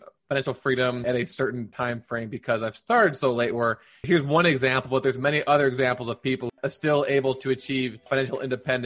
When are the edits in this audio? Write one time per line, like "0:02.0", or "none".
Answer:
0:06.5
0:08.0